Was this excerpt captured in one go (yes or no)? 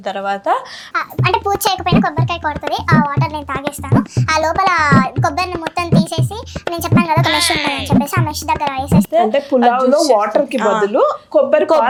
yes